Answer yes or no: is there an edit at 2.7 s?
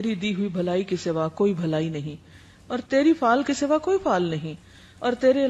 no